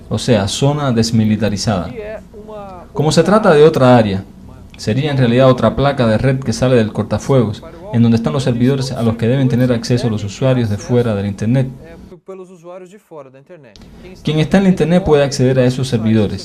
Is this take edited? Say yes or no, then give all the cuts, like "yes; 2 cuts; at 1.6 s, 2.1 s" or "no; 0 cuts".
no; 0 cuts